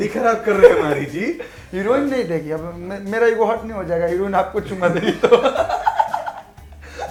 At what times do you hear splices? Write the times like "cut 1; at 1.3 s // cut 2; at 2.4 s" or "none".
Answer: none